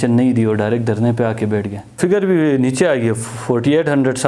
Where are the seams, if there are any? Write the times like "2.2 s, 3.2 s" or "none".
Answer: 2.0 s